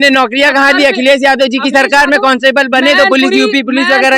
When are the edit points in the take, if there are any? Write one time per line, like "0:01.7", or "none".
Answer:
none